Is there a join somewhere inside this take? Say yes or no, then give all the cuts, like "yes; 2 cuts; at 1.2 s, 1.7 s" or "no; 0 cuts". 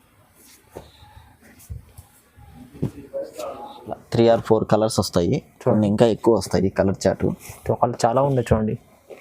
yes; 1 cut; at 4.0 s